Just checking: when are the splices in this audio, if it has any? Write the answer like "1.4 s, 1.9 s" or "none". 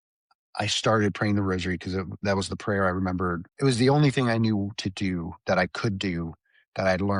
3.5 s